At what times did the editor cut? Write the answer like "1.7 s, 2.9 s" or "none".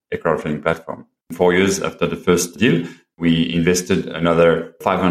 1.3 s, 2.7 s